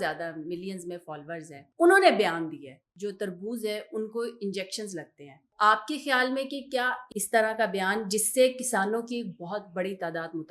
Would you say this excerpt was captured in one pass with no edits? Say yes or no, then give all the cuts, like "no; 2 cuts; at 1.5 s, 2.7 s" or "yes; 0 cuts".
no; 4 cuts; at 1.6 s, 2.8 s, 5.5 s, 7.0 s